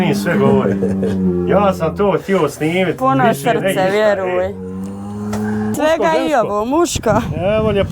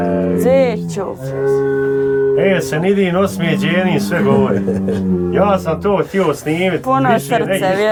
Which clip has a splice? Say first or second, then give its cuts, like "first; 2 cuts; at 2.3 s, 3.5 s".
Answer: first; 1 cut; at 5.7 s